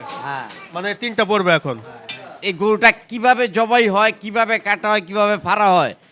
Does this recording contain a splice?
yes; 1 cut; at 2.4 s

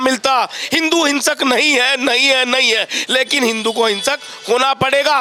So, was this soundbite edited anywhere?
no; 0 cuts

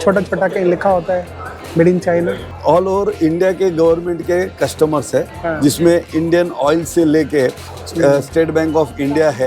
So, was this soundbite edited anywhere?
yes; 1 cut; at 2.5 s

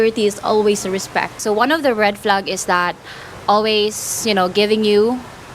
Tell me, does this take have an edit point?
yes; 1 cut; at 1.4 s

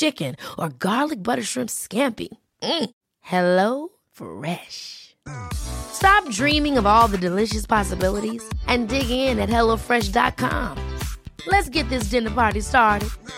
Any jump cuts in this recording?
no; 0 cuts

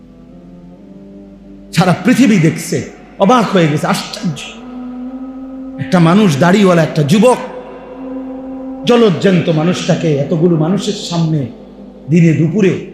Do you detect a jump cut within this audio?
yes; 3 cuts; at 1.4 s, 4.5 s, 5.9 s

